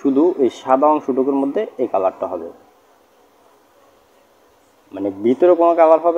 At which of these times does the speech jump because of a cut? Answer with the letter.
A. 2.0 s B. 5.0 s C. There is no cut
C